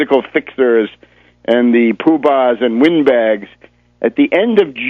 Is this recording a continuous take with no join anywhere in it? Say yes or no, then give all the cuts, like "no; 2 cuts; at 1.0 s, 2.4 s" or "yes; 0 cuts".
yes; 0 cuts